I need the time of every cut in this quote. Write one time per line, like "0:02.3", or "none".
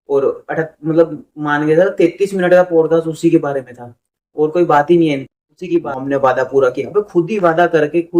0:05.9